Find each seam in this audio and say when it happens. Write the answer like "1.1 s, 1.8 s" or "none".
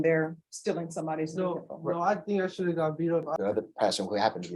3.4 s